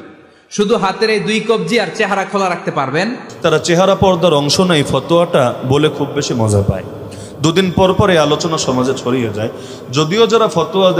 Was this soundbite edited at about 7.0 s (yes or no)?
no